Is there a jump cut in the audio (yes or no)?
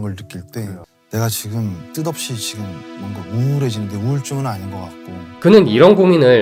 no